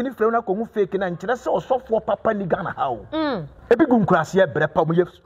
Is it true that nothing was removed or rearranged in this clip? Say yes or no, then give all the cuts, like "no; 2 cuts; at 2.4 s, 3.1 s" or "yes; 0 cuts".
no; 1 cut; at 3.5 s